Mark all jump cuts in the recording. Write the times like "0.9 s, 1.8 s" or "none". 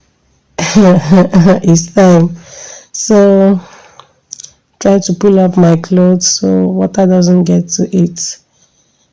none